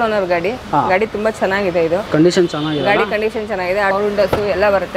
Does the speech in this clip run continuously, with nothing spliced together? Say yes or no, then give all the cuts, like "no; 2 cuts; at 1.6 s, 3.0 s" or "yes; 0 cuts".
no; 1 cut; at 3.9 s